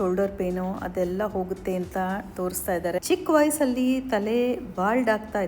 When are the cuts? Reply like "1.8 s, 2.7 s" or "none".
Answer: 3.0 s